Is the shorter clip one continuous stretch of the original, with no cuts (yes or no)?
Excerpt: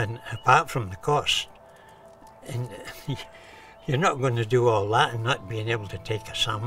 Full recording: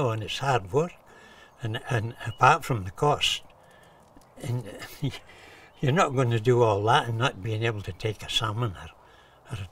yes